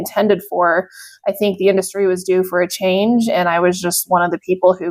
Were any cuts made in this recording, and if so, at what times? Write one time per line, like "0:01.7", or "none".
none